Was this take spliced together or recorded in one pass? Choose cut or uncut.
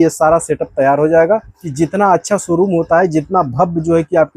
cut